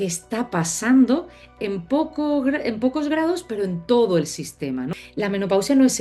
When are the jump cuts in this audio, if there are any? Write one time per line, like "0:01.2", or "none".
0:04.9